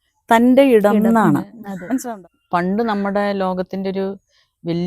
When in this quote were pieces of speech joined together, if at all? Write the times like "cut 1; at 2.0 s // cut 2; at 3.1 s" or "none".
cut 1; at 2.0 s